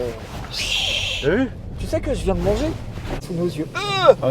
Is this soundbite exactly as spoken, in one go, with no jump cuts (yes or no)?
no